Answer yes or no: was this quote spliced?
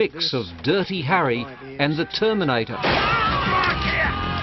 yes